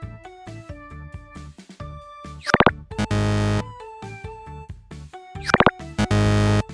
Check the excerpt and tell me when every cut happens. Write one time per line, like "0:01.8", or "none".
none